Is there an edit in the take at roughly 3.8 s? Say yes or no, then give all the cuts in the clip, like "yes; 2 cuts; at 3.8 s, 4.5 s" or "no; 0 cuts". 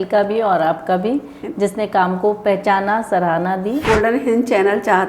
yes; 1 cut; at 3.8 s